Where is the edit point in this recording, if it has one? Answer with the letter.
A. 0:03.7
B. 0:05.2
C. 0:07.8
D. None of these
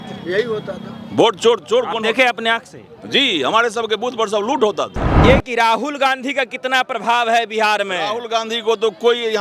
B